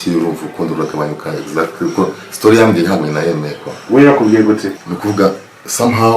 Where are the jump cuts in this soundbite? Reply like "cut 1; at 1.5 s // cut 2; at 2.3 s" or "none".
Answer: cut 1; at 4.7 s